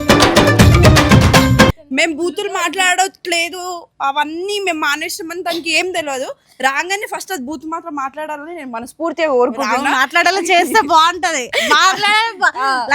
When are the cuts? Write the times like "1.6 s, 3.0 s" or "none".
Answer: 1.7 s